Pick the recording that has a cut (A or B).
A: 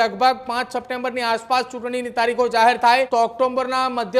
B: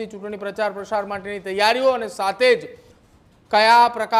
A